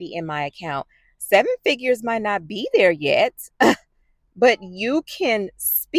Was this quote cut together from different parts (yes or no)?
no